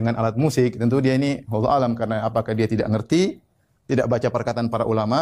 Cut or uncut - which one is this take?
uncut